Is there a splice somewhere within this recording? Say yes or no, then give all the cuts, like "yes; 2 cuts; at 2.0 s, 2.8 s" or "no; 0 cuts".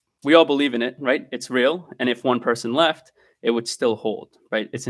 no; 0 cuts